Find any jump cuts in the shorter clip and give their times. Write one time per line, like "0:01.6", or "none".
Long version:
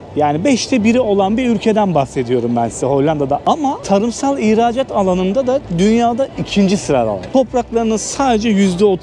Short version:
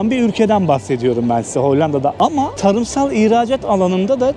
none